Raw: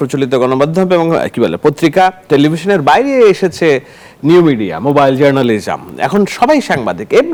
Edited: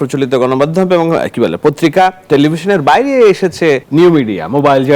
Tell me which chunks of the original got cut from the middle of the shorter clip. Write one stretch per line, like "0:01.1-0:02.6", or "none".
0:03.8-0:04.2